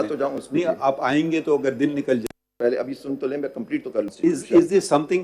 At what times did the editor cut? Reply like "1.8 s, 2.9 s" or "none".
2.5 s, 4.1 s